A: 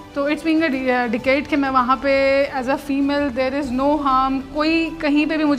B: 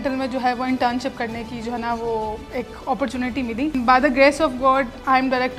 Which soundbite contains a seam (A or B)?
B